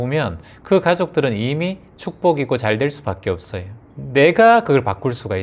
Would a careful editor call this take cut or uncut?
uncut